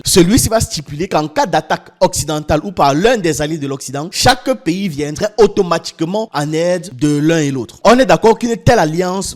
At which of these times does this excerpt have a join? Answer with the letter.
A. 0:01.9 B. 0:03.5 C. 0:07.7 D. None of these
C